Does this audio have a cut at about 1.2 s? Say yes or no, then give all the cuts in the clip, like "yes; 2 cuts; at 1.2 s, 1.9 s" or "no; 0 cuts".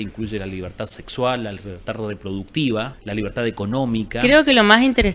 no; 2 cuts; at 3.0 s, 4.2 s